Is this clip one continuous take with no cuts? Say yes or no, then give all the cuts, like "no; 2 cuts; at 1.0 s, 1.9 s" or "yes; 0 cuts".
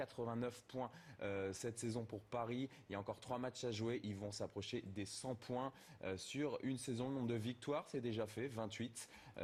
yes; 0 cuts